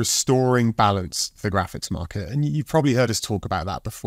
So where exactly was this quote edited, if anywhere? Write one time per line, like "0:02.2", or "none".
none